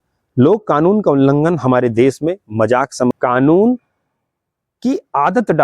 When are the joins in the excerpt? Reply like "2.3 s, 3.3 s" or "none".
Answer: 3.1 s